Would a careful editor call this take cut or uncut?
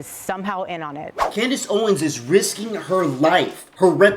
cut